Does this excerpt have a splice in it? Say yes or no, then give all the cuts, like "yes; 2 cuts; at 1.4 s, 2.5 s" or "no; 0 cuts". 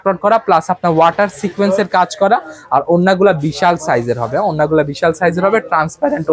no; 0 cuts